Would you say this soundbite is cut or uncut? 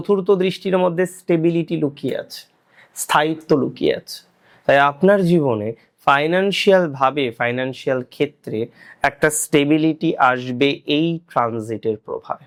uncut